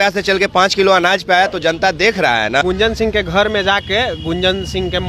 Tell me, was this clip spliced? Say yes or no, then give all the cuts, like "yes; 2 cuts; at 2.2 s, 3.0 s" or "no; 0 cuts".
no; 0 cuts